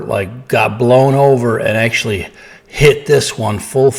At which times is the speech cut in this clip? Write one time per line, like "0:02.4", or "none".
none

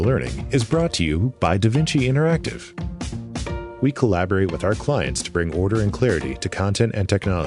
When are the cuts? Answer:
0:03.6

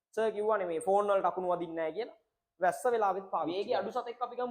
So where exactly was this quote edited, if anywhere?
0:03.5

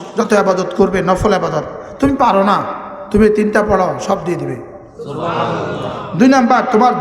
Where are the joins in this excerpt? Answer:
none

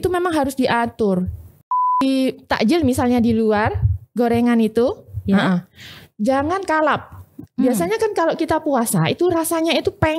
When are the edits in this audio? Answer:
0:01.9

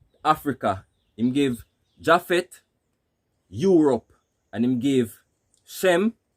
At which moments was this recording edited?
none

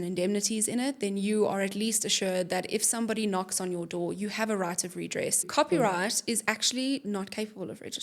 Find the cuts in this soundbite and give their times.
0:05.5

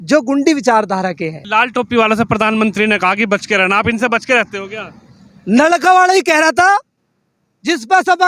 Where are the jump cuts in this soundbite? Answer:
0:01.4

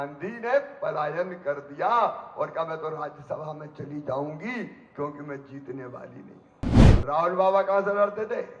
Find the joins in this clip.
0:06.9

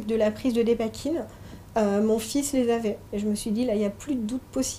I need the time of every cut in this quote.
0:03.0

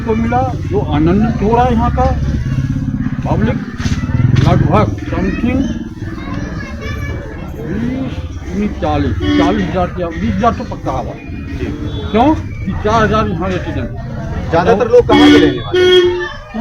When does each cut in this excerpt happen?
none

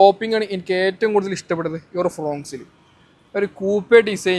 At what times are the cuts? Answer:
none

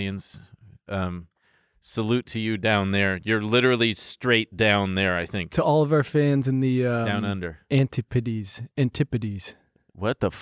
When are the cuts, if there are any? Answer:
none

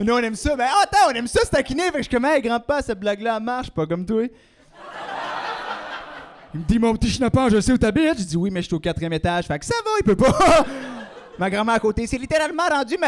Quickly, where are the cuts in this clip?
none

